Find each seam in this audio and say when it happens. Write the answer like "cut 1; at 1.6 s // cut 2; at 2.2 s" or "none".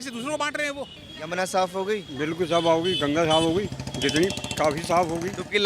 cut 1; at 1.0 s